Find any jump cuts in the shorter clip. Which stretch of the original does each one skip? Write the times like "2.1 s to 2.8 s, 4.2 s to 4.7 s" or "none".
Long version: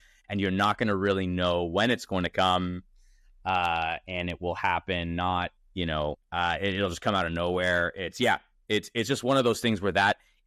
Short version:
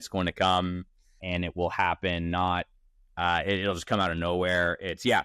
3.2 s to 4.1 s, 5.8 s to 6.1 s